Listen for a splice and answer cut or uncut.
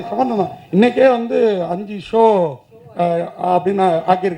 uncut